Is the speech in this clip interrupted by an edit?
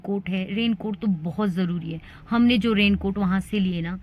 no; 0 cuts

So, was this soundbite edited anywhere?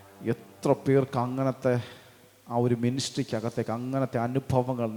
no; 0 cuts

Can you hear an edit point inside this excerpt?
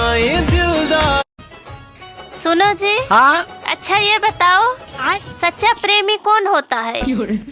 yes; 1 cut; at 1.4 s

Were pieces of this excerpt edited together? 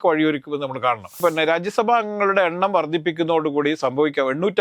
yes; 1 cut; at 1.2 s

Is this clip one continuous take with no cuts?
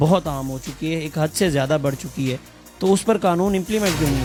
yes; 0 cuts

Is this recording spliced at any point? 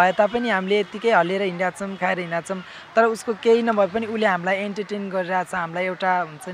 no; 0 cuts

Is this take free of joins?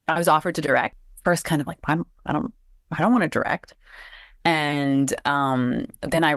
yes; 0 cuts

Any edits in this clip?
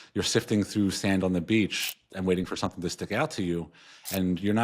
no; 0 cuts

